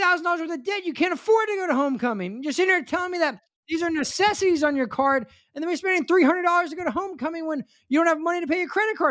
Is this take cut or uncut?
uncut